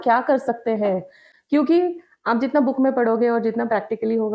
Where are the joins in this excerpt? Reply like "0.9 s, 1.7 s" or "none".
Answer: 1.3 s